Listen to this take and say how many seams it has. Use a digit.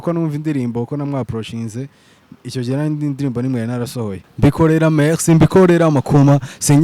1